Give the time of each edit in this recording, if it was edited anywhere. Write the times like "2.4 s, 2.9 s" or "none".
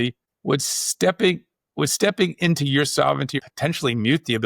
3.4 s